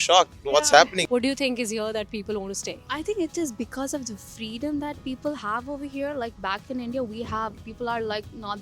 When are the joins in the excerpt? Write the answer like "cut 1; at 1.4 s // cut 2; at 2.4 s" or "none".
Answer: cut 1; at 1.0 s // cut 2; at 2.8 s